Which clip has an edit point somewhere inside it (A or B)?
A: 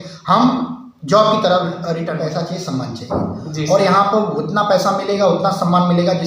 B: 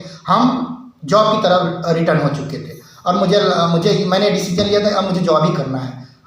A